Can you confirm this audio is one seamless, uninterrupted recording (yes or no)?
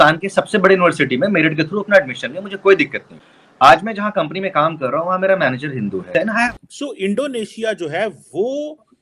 no